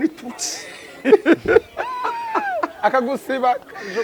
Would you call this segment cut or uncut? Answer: uncut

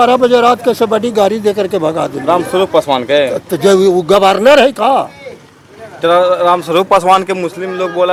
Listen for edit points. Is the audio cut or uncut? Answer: uncut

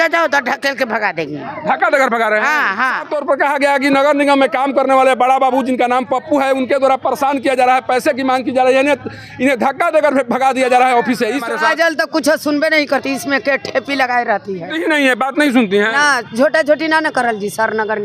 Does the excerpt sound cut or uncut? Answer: cut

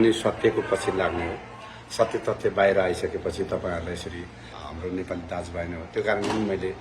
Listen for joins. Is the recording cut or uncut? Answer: cut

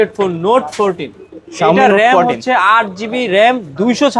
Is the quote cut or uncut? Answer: uncut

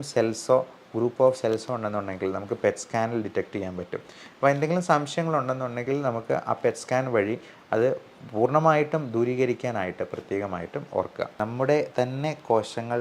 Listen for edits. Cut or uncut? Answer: cut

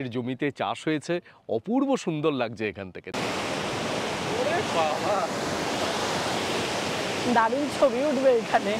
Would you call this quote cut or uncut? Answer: cut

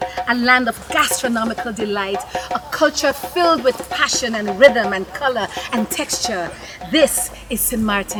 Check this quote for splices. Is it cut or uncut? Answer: uncut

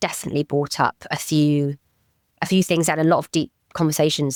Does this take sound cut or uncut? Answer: uncut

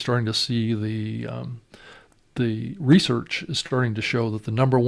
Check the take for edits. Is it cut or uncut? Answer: uncut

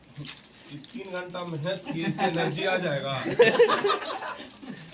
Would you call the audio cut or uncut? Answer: uncut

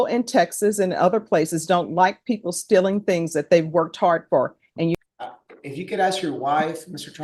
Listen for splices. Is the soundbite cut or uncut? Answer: cut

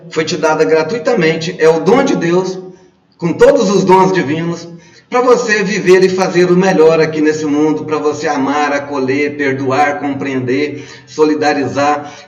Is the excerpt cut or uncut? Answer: uncut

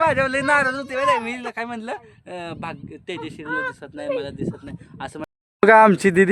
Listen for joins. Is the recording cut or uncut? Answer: cut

